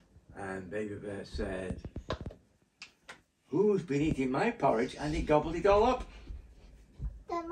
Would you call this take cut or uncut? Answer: uncut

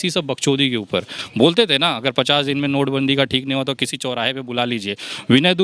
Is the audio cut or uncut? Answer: cut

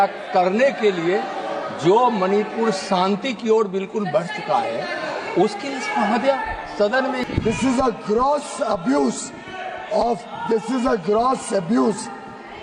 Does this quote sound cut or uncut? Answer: cut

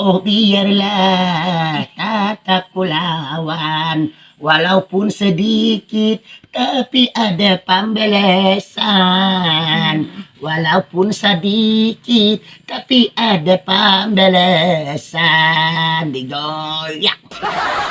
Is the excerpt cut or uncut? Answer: uncut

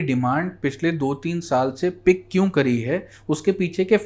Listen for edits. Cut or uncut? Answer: uncut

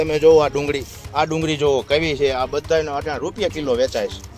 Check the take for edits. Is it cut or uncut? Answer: cut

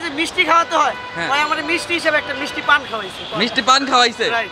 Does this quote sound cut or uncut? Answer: uncut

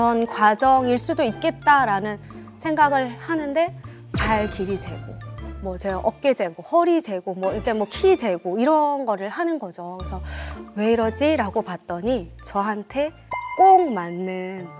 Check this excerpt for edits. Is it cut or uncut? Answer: uncut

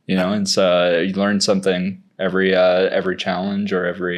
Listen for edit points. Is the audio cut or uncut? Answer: uncut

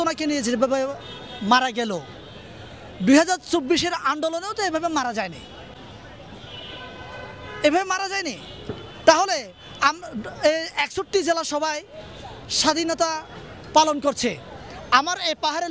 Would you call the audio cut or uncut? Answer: uncut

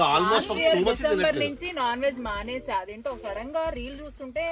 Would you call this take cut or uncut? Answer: uncut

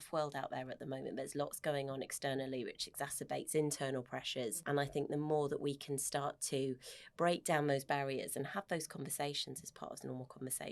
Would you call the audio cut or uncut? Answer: cut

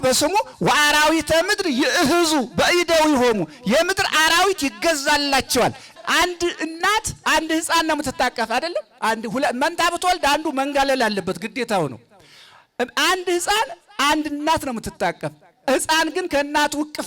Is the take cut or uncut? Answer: cut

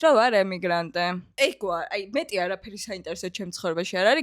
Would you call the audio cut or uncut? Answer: cut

